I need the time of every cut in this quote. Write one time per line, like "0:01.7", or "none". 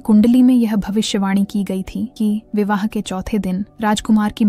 none

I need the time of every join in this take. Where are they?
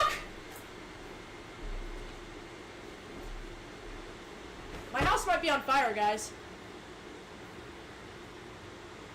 0:03.5

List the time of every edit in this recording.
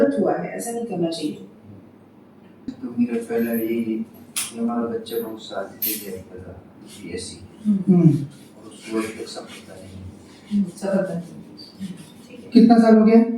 0:02.6

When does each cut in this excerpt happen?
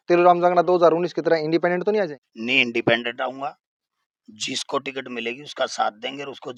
none

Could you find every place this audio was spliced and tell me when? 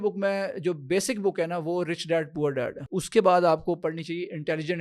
0:02.9

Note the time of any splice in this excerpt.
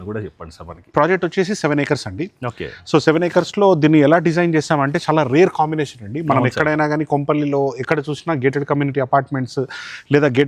0:00.9

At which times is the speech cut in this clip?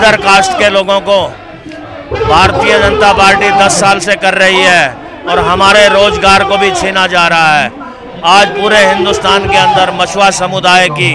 none

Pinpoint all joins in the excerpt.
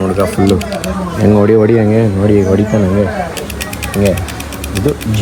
none

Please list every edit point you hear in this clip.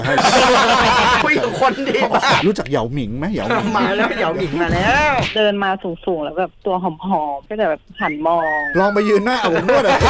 0:02.4
0:05.3

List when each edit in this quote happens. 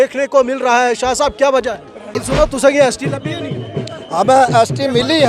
0:02.1

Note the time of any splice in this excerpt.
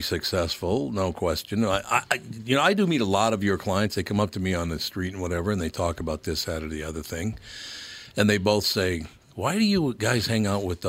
none

